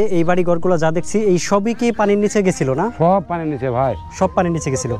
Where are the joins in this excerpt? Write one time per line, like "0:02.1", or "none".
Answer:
none

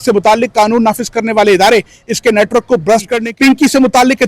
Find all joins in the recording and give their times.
0:03.2

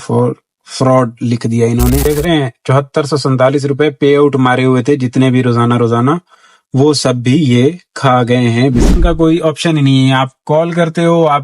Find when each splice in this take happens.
0:02.1
0:08.9

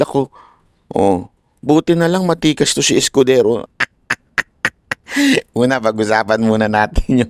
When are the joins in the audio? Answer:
0:03.7

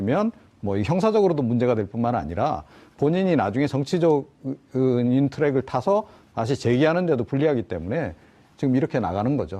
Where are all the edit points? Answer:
0:02.3

